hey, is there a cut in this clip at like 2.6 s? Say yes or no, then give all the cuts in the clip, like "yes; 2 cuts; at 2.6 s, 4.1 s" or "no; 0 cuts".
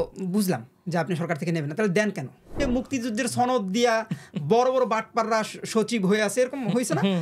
yes; 1 cut; at 2.6 s